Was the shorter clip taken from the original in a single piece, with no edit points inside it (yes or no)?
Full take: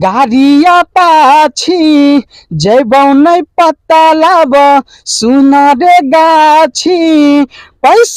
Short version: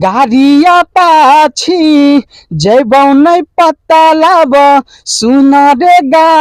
yes